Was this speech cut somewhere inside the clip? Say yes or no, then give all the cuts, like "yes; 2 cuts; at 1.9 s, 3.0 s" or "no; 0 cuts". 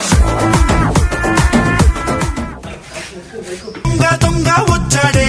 yes; 1 cut; at 2.6 s